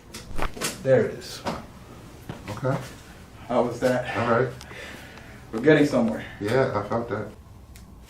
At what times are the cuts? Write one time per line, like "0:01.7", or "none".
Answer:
0:01.4
0:07.3